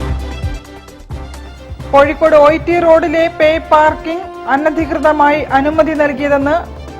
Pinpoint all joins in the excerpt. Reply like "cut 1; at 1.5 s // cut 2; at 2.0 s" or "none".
cut 1; at 1.1 s